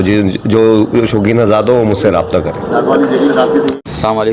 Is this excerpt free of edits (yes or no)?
yes